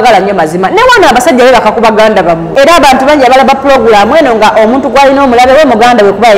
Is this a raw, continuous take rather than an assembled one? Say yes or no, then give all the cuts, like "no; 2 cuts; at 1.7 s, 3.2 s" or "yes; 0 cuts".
no; 1 cut; at 2.5 s